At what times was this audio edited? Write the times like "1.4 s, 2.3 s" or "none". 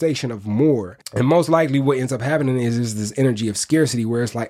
0.9 s